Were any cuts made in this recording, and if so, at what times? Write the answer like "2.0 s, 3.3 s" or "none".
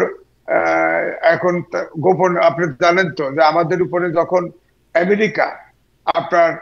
none